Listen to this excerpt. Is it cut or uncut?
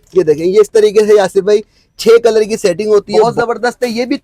cut